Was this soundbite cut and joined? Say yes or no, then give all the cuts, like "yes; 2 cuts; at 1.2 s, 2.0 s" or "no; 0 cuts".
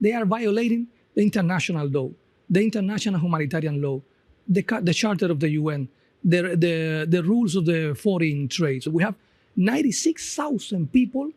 no; 0 cuts